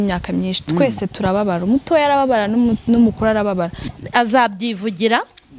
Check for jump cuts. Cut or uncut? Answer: cut